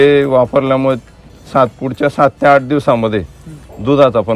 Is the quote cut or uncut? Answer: uncut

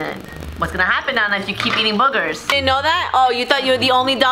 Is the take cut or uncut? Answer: cut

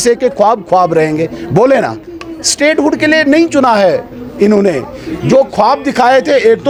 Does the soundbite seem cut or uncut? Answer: uncut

